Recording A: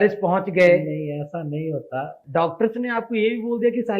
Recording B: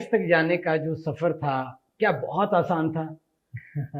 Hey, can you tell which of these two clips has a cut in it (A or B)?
A